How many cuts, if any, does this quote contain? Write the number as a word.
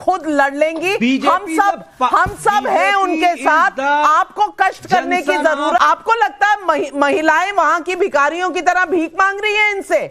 one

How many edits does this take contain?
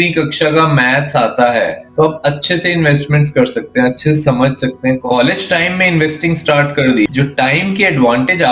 three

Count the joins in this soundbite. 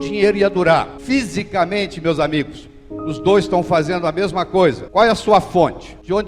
two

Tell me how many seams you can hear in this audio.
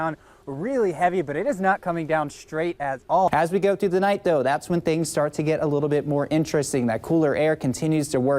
one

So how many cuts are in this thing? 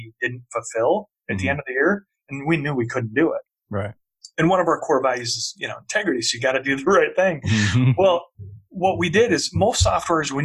one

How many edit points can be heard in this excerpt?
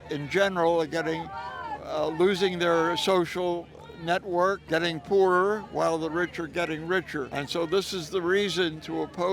one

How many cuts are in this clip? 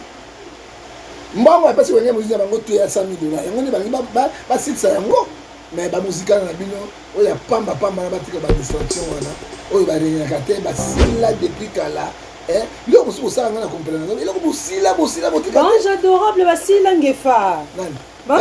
one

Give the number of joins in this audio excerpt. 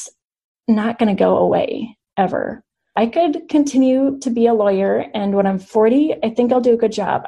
one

